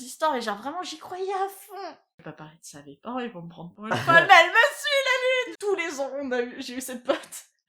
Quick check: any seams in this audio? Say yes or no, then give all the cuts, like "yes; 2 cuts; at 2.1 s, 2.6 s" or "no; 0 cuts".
yes; 2 cuts; at 2.1 s, 5.5 s